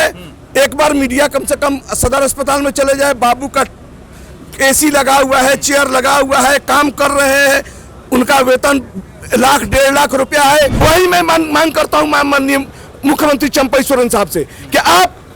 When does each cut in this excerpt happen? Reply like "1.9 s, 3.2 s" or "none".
10.8 s